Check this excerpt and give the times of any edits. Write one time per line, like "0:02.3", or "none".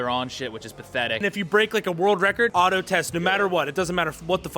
0:01.2
0:02.5

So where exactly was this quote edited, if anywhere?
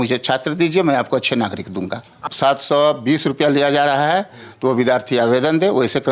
0:02.2

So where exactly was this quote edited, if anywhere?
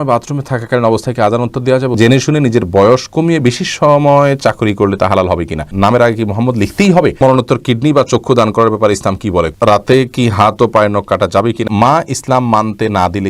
0:02.0
0:05.7
0:07.2
0:09.5
0:11.6

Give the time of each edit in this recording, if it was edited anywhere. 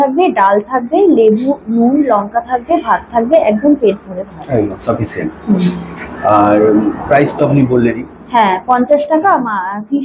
none

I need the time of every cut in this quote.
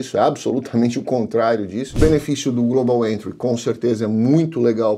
0:01.9

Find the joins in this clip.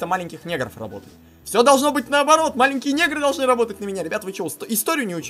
none

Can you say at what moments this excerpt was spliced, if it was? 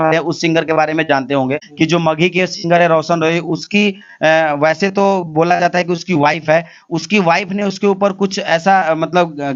0:01.6

